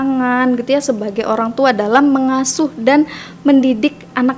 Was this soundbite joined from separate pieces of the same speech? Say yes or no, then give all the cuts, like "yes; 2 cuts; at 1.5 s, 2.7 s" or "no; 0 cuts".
no; 0 cuts